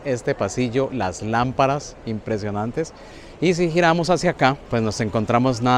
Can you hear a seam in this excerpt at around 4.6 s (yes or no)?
yes